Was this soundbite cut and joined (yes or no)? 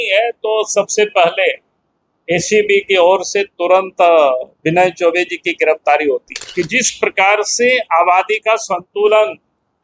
yes